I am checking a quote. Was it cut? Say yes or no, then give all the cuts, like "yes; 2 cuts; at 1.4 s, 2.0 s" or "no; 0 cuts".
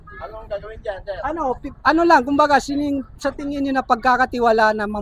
no; 0 cuts